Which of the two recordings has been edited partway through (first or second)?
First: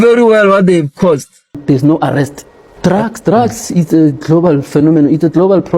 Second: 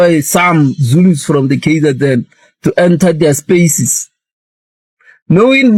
first